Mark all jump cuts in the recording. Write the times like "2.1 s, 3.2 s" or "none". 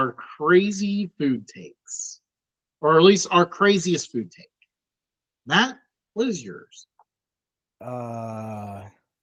none